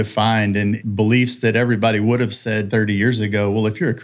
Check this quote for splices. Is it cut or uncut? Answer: cut